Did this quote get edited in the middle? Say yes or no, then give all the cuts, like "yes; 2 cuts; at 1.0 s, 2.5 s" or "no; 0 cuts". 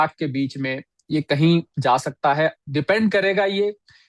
no; 0 cuts